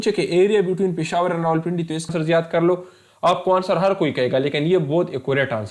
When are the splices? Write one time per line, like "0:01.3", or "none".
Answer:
0:02.1